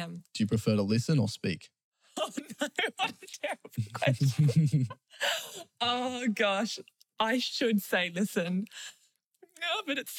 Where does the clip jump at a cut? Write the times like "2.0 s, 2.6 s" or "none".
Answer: none